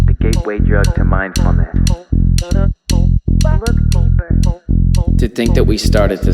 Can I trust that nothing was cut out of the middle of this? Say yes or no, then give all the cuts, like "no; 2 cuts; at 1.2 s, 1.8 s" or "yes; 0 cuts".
yes; 0 cuts